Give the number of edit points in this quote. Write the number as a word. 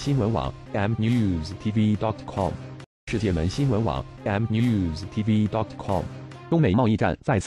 zero